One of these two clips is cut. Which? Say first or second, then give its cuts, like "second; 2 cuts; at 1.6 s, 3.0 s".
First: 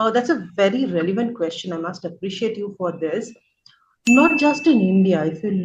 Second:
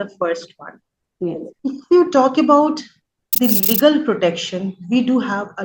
second; 1 cut; at 1.5 s